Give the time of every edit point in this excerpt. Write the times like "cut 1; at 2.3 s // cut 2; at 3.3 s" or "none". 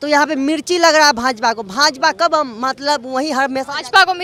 none